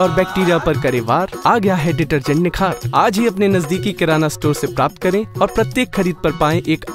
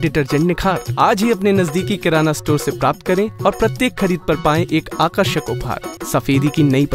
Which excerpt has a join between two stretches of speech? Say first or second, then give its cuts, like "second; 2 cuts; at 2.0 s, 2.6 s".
second; 1 cut; at 5.9 s